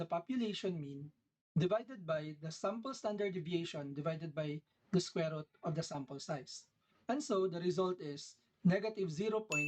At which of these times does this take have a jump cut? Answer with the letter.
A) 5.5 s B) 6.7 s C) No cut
C